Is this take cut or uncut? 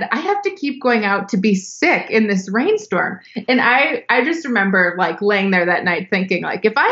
uncut